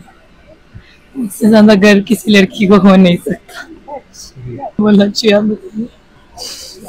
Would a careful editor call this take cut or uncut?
cut